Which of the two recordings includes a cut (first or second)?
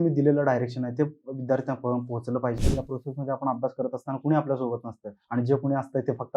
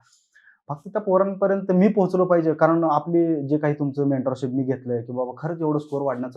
first